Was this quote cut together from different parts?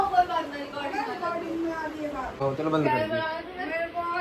yes; 1 cut; at 2.4 s

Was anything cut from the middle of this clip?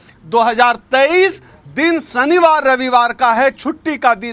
no; 0 cuts

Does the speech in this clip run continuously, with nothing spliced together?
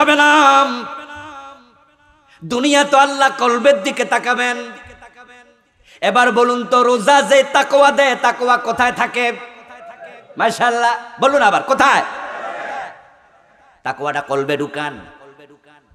yes; 0 cuts

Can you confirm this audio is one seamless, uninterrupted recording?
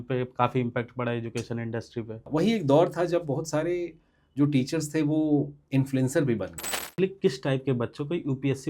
no; 2 cuts; at 2.2 s, 7.0 s

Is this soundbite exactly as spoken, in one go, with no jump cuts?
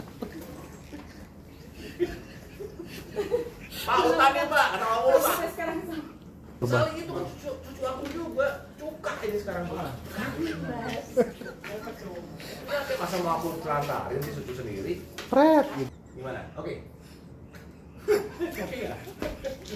no; 2 cuts; at 6.6 s, 15.9 s

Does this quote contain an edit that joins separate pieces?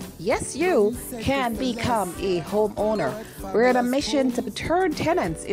no; 0 cuts

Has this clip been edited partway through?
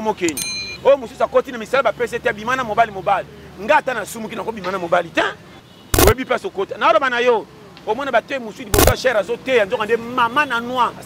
yes; 1 cut; at 5.7 s

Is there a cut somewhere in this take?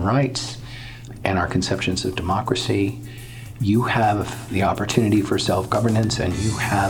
yes; 1 cut; at 1.1 s

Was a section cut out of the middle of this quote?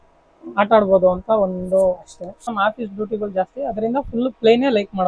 yes; 1 cut; at 2.4 s

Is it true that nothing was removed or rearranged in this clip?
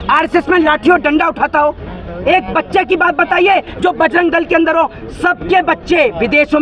yes; 0 cuts

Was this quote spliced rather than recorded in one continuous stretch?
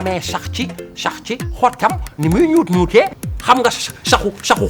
yes; 1 cut; at 3.2 s

